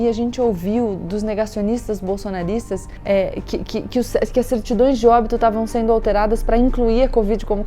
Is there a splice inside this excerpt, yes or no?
yes